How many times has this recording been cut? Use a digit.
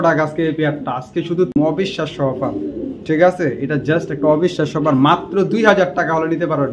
1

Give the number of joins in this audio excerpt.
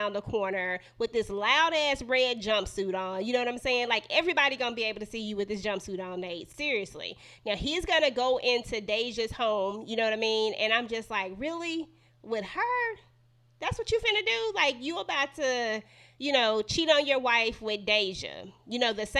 0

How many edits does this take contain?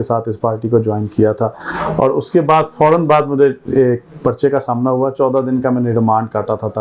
0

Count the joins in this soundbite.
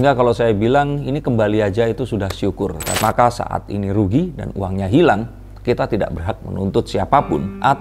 1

